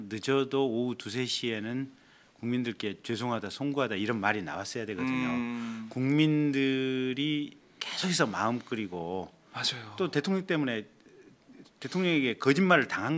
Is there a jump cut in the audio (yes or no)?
yes